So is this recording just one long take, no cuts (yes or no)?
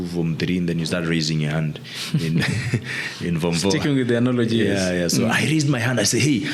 yes